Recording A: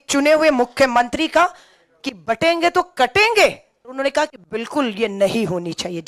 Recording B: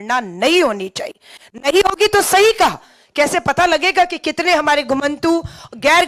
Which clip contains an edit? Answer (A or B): A